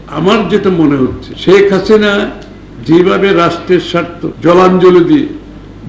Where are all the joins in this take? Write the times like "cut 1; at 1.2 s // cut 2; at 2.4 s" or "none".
cut 1; at 1.3 s // cut 2; at 4.2 s